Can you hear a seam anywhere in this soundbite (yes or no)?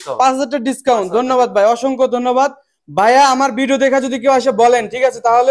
no